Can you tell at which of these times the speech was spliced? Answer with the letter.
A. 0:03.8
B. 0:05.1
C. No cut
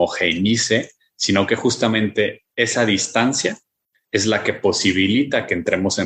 C